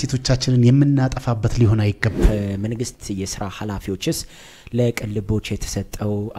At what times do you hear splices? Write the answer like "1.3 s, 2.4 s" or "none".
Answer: 2.2 s